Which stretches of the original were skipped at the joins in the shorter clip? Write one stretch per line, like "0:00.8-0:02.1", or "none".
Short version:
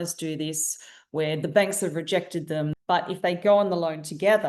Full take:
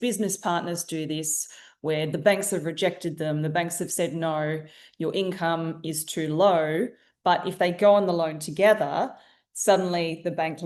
0:03.4-0:07.1